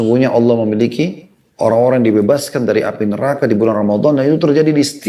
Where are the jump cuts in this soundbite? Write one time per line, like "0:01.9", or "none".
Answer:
none